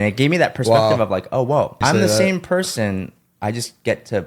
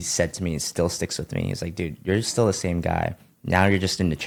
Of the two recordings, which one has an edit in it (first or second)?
first